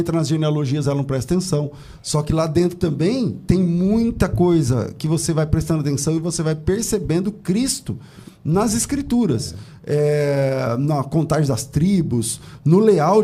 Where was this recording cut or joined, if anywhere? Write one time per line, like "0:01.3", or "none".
none

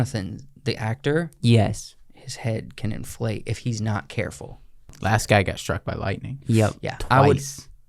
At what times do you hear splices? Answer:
0:04.9

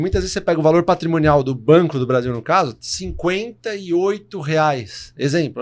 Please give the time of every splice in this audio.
none

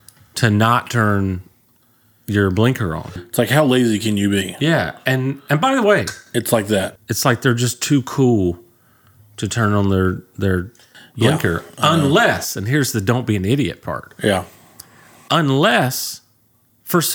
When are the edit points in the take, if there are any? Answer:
0:03.2
0:07.0

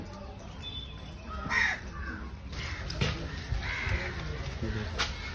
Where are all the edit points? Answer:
0:02.5

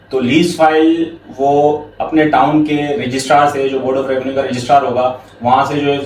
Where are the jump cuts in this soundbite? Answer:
none

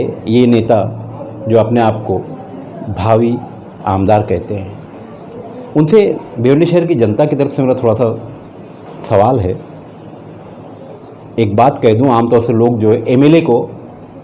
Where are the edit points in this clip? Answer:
0:11.0

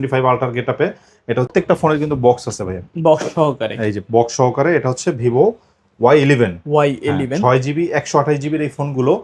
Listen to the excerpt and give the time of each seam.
0:01.5

